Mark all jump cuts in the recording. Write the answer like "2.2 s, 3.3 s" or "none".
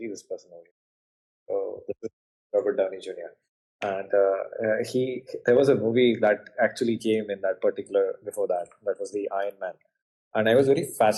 none